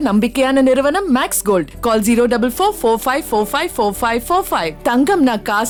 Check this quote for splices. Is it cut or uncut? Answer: uncut